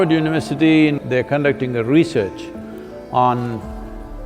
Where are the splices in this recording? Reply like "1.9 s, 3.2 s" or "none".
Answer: 1.0 s